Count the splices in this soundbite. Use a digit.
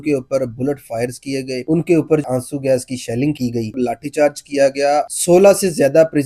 3